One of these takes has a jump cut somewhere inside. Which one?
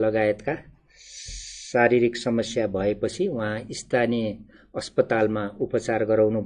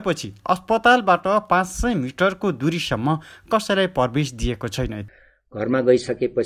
second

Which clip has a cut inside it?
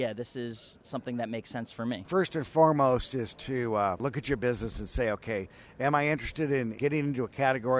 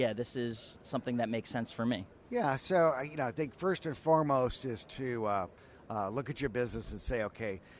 first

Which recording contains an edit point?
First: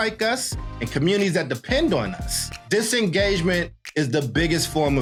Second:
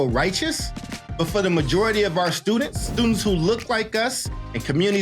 second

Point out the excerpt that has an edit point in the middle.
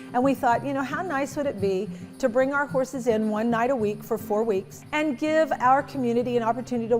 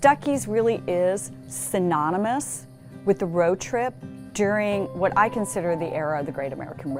first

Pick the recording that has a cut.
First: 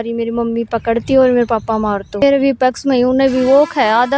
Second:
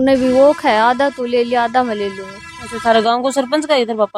first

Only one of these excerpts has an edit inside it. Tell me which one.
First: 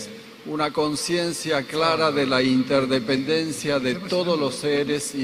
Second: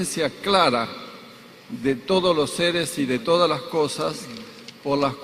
second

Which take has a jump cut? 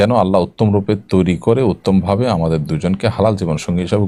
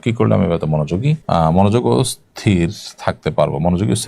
second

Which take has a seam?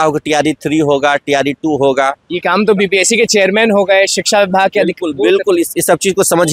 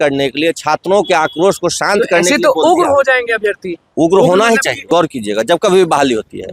second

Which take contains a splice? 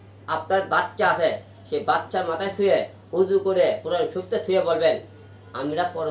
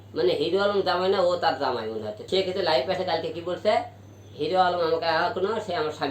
second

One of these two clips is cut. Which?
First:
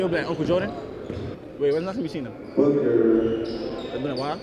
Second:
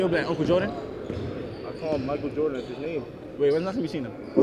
first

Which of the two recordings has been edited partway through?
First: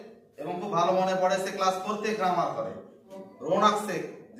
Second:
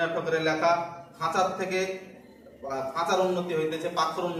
first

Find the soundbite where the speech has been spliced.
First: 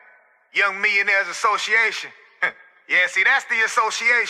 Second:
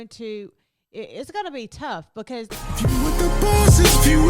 second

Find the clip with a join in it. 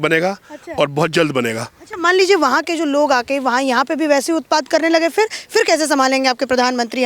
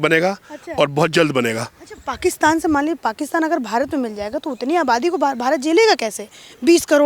first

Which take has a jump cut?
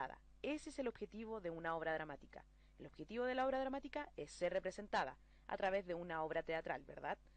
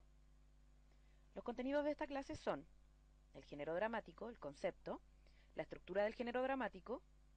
first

